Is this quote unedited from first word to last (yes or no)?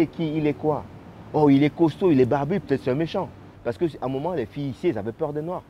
no